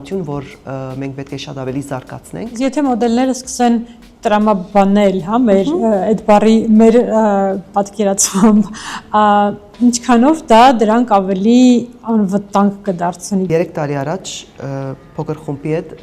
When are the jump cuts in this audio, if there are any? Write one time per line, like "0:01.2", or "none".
0:02.6
0:13.5